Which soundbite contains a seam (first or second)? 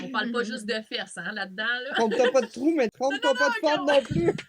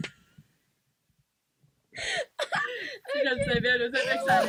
first